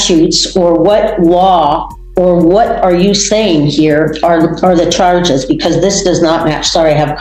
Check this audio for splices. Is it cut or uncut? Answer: uncut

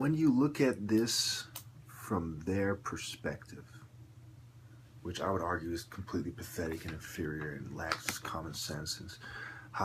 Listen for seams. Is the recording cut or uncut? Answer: uncut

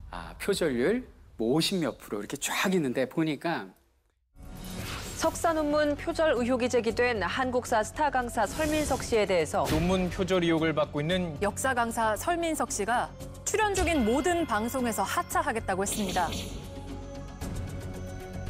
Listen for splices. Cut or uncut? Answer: uncut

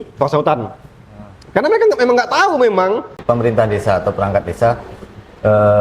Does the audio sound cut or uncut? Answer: cut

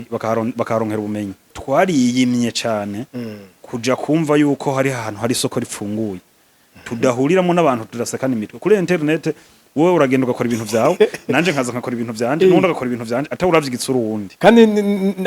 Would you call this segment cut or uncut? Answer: cut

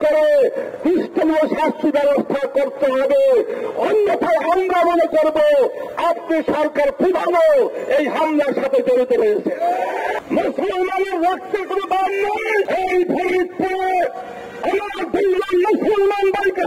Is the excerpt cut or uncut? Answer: cut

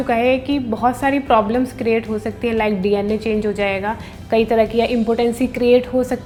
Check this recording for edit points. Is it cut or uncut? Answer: uncut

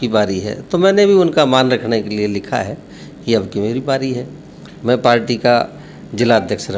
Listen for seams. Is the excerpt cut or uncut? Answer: uncut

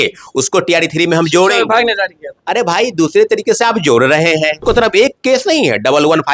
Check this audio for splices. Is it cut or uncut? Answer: cut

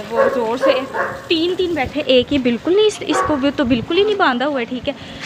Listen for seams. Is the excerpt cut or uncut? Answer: uncut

